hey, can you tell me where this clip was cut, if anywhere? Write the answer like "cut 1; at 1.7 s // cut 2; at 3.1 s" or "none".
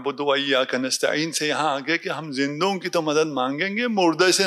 none